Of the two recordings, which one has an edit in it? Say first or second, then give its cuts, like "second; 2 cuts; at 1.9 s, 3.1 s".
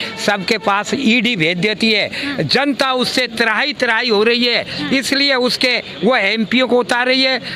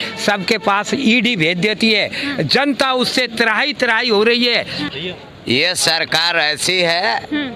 second; 1 cut; at 4.8 s